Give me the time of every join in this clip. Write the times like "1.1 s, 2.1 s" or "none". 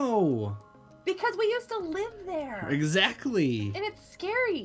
3.7 s